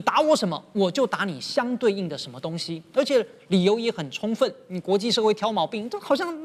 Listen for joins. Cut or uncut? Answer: uncut